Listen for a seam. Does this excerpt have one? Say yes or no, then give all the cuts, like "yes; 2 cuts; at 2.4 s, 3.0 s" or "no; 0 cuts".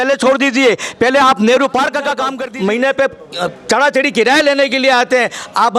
yes; 1 cut; at 2.3 s